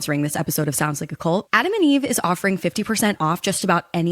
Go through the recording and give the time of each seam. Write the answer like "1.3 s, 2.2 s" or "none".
1.5 s